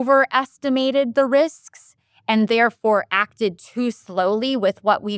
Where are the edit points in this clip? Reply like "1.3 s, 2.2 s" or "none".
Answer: none